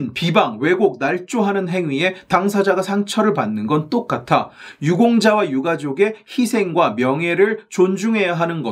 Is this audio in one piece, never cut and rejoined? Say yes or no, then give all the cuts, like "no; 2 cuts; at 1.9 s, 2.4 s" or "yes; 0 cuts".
yes; 0 cuts